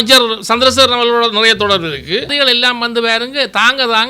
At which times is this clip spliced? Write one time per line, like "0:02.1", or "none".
0:02.3